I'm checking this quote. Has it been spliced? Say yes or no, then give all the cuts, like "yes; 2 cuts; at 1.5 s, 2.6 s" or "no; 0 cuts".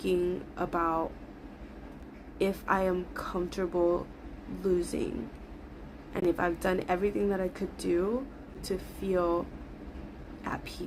yes; 1 cut; at 8.6 s